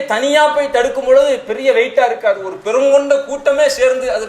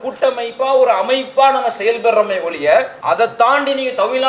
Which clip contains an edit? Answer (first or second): second